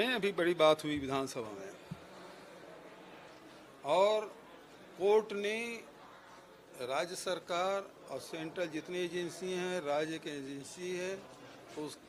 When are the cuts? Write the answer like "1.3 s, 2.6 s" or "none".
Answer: none